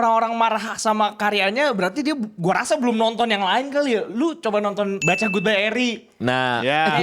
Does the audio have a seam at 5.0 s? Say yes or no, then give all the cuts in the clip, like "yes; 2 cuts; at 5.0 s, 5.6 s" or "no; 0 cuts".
yes; 1 cut; at 5.0 s